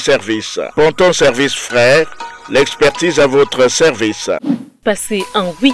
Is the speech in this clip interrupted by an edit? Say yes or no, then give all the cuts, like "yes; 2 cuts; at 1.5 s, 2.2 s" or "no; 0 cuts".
yes; 1 cut; at 4.8 s